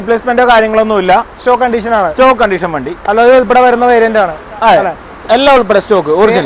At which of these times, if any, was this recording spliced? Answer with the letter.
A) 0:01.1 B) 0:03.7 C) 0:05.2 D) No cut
D